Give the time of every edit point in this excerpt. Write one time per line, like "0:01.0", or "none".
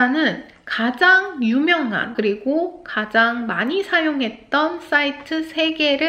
none